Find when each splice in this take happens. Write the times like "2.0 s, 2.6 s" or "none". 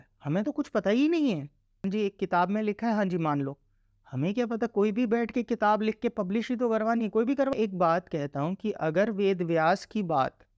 1.8 s, 7.5 s